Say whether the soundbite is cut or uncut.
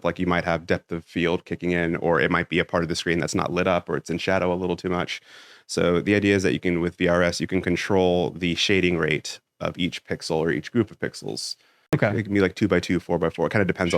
cut